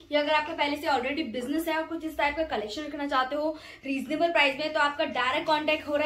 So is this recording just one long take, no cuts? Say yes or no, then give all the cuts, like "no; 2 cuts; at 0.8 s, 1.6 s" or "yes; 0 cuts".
yes; 0 cuts